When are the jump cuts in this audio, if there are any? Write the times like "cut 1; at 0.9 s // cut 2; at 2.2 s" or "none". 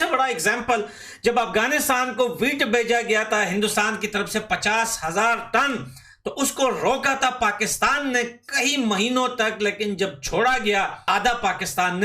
cut 1; at 11.0 s